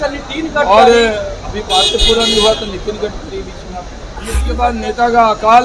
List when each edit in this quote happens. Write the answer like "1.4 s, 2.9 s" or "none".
4.4 s